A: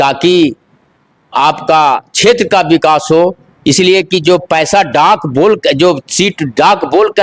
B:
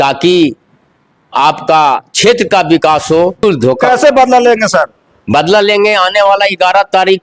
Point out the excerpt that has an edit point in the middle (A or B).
B